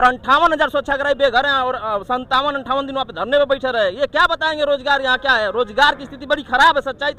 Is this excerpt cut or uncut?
uncut